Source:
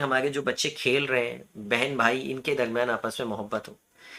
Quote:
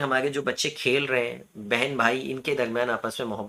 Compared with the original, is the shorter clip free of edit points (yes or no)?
yes